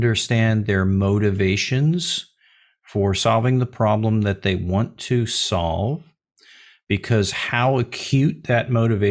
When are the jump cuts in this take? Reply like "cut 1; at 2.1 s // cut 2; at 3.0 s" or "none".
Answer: none